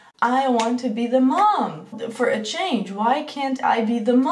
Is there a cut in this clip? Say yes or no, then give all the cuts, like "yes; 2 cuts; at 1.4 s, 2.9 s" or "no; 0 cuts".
yes; 1 cut; at 1.9 s